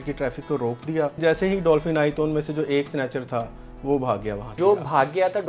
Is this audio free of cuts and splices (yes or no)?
no